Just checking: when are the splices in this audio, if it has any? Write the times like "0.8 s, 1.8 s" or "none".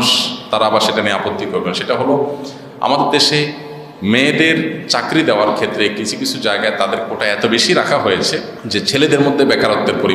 8.6 s